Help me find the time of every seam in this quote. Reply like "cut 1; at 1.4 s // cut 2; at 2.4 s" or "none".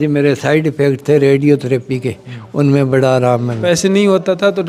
cut 1; at 3.5 s